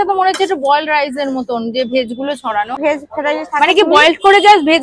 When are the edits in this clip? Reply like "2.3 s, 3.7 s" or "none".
2.8 s